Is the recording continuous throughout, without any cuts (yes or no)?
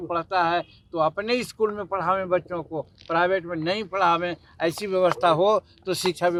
yes